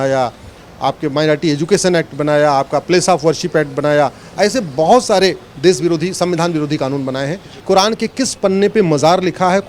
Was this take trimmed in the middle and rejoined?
yes; 1 cut; at 7.5 s

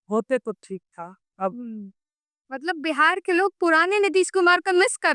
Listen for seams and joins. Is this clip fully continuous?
yes; 0 cuts

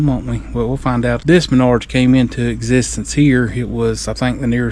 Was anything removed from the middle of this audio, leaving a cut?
yes; 1 cut; at 1.1 s

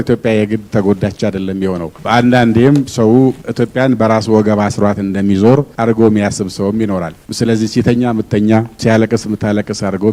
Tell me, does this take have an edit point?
no; 0 cuts

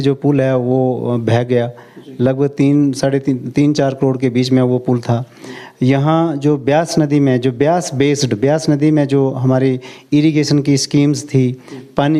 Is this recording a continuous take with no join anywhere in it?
yes; 0 cuts

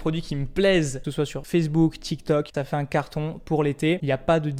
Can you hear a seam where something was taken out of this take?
yes; 2 cuts; at 1.0 s, 2.5 s

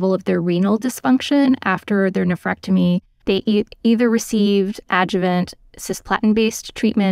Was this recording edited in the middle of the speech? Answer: no; 0 cuts

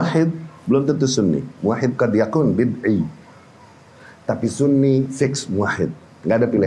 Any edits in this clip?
no; 0 cuts

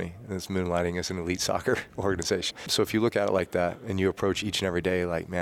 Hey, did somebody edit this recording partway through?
yes; 2 cuts; at 2.6 s, 4.4 s

